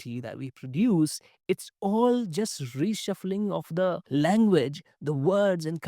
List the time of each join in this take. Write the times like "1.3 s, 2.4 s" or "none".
4.0 s